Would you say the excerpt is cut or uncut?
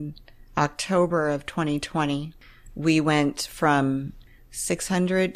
cut